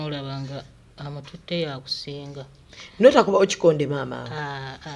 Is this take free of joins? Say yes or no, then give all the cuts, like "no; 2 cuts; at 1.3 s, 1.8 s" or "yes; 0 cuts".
yes; 0 cuts